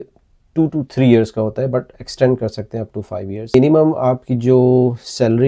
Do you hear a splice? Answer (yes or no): yes